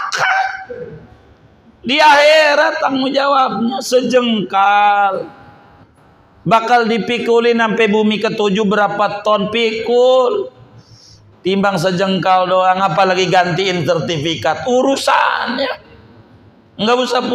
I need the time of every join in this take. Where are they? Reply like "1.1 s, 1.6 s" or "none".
none